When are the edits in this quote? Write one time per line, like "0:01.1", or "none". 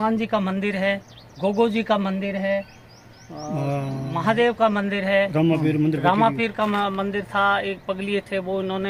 none